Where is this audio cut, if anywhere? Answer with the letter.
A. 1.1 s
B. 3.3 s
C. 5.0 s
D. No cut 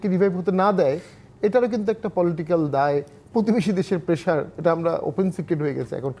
D